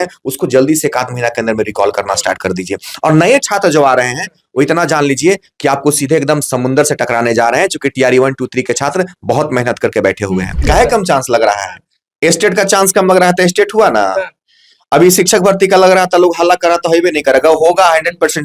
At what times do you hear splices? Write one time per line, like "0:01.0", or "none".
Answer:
0:10.5